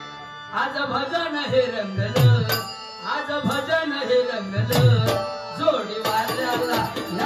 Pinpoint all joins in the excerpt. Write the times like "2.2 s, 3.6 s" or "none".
none

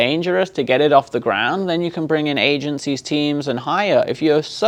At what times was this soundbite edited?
none

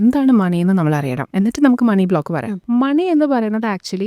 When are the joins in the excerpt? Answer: 1.2 s, 2.6 s

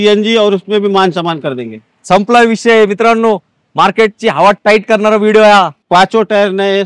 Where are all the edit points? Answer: 5.8 s

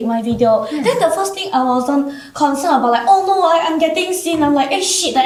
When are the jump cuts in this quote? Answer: none

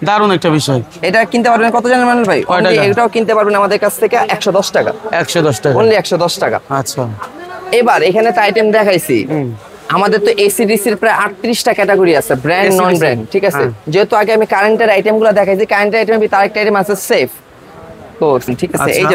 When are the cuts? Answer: none

